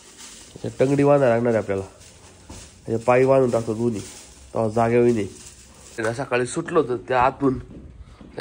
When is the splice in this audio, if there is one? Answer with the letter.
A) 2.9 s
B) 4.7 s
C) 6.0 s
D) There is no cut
C